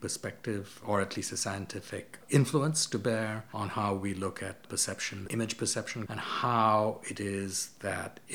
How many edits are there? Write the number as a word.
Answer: two